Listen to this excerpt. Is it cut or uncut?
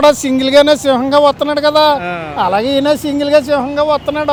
uncut